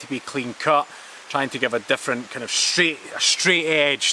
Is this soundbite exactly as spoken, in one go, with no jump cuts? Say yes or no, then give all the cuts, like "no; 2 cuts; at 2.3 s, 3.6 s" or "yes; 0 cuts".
yes; 0 cuts